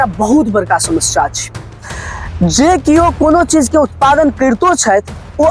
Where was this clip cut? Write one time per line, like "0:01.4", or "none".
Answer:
none